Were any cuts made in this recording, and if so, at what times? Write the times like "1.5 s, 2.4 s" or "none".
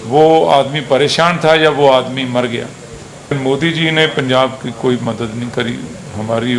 3.3 s